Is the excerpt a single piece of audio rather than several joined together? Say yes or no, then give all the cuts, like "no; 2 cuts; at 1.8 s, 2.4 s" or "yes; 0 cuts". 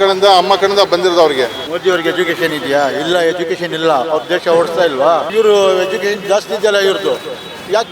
no; 2 cuts; at 1.6 s, 5.3 s